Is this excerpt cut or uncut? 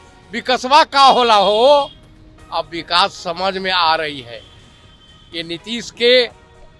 uncut